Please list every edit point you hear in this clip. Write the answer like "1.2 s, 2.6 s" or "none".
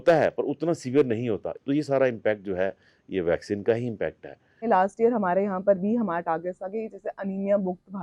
1.5 s, 4.6 s